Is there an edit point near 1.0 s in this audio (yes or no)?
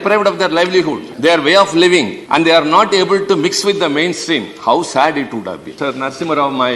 yes